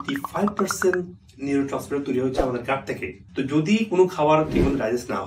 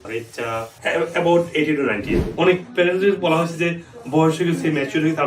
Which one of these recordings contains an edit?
second; 2 cuts; at 0.8 s, 2.1 s

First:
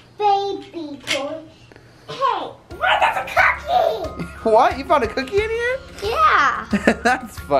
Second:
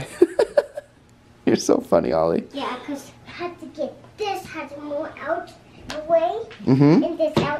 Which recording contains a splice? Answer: second; 1 cut; at 3.2 s

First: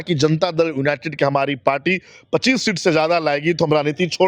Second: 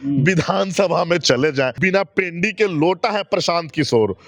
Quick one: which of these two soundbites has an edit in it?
second; 1 cut; at 1.8 s

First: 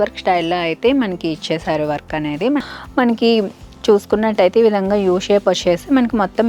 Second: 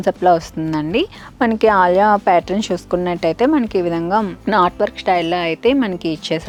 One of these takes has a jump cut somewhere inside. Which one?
first; 1 cut; at 2.7 s

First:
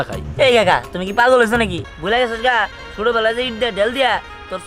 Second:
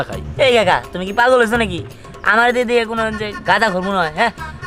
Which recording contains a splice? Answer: first; 1 cut; at 1.9 s

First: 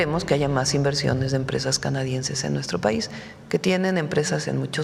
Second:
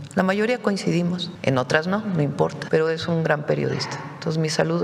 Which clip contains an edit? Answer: second; 2 cuts; at 1.3 s, 2.6 s

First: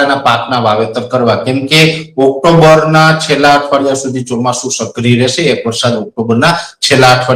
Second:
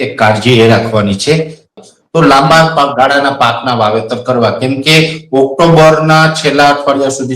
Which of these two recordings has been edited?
second; 1 cut; at 1.8 s

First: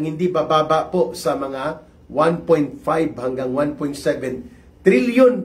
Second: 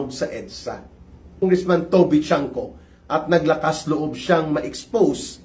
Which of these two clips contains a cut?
second; 1 cut; at 1.4 s

